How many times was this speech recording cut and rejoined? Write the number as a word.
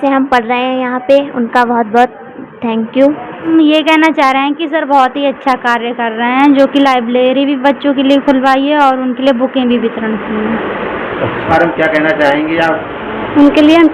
two